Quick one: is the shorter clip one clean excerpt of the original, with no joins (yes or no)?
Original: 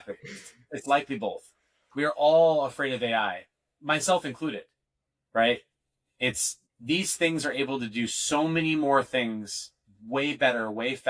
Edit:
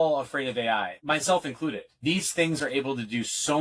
no